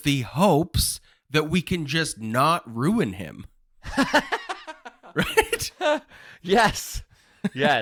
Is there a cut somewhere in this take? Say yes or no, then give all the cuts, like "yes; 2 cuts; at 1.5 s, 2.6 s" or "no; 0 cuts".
no; 0 cuts